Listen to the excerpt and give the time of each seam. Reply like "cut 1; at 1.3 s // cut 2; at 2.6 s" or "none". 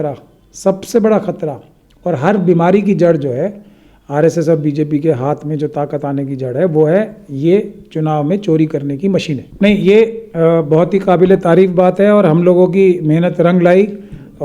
cut 1; at 9.4 s